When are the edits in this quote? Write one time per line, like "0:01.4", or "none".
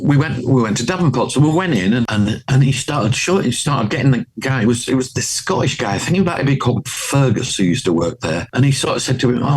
0:02.1
0:08.5